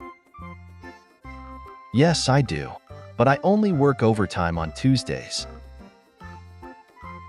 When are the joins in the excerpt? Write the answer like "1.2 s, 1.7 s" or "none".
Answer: 1.9 s, 5.2 s

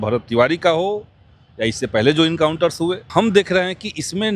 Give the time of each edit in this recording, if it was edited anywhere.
3.1 s

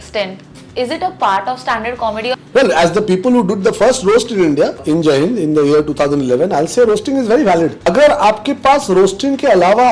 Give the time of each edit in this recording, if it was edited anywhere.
2.4 s, 4.8 s, 7.9 s

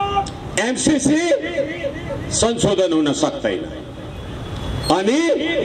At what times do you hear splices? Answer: none

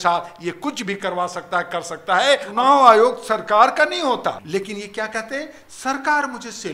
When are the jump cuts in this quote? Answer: 2.5 s, 4.4 s

